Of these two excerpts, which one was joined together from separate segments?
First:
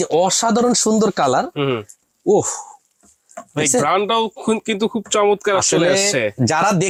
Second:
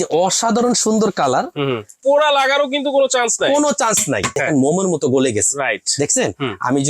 second; 2 cuts; at 2.0 s, 4.4 s

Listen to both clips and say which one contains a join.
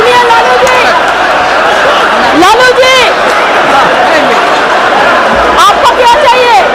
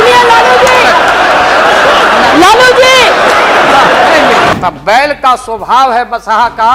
second; 1 cut; at 4.5 s

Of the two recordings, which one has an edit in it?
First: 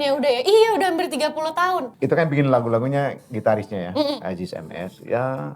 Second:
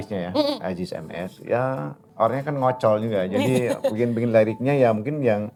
first; 1 cut; at 1.9 s

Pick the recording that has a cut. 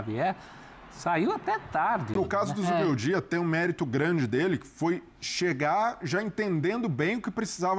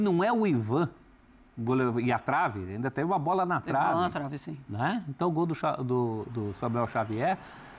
first; 1 cut; at 2.1 s

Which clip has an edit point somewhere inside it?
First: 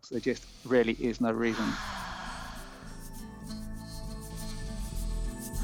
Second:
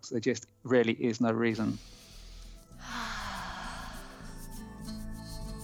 first; 1 cut; at 1.8 s

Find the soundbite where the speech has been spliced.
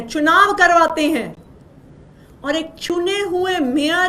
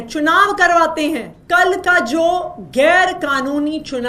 second; 1 cut; at 1.3 s

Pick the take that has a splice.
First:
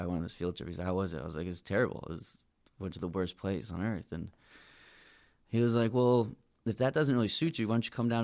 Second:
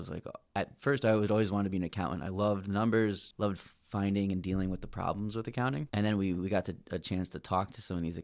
second; 2 cuts; at 3.3 s, 5.9 s

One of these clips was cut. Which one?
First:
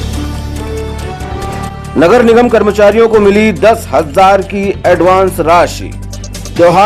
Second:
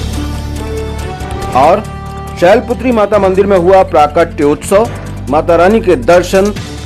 second; 1 cut; at 1.2 s

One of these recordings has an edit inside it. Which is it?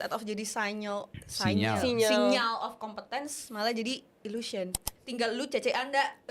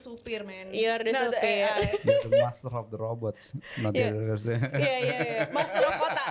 first; 1 cut; at 4.9 s

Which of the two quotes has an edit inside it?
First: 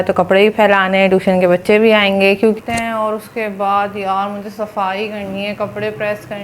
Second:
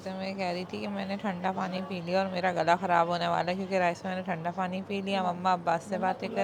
first; 1 cut; at 2.6 s

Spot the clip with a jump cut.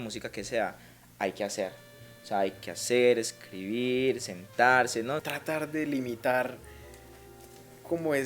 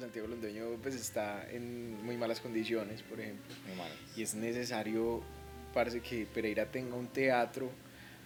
first; 1 cut; at 5.3 s

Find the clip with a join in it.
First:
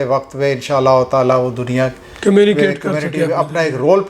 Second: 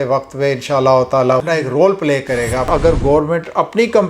second; 2 cuts; at 1.4 s, 2.7 s

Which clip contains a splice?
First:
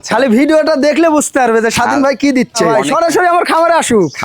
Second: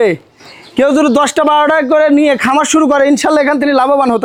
first; 1 cut; at 2.8 s

